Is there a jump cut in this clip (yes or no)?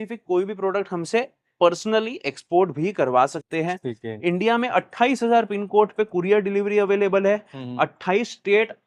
no